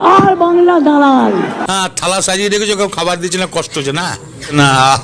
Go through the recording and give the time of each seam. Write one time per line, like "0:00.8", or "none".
0:01.6